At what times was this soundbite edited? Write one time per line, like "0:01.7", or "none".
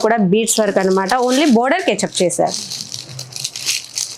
none